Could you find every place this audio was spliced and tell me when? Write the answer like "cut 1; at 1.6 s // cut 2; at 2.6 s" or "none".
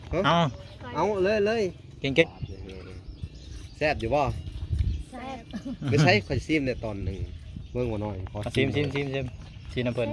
cut 1; at 2.2 s